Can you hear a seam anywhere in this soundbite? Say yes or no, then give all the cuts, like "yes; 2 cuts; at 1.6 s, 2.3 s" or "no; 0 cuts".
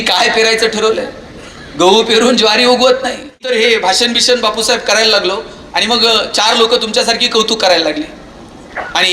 yes; 1 cut; at 3.3 s